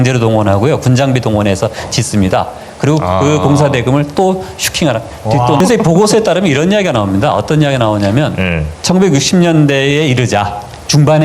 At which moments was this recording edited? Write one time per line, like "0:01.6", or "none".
0:05.6